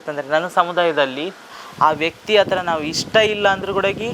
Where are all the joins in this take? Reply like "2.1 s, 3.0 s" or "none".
1.5 s